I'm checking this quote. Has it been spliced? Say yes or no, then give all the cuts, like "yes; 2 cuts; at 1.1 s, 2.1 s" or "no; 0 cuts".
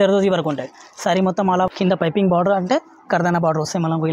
yes; 1 cut; at 1.7 s